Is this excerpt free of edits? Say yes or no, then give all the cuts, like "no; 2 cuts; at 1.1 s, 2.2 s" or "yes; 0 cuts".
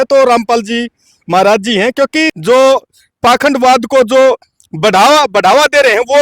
no; 1 cut; at 2.3 s